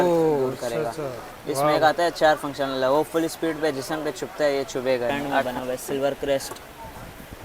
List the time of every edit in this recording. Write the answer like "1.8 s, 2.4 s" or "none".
5.5 s